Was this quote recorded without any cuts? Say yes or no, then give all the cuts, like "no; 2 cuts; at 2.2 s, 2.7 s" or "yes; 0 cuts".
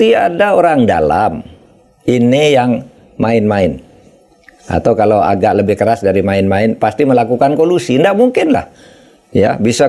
yes; 0 cuts